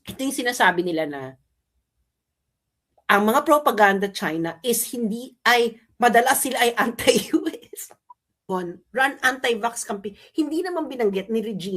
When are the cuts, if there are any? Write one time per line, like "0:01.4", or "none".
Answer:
0:08.4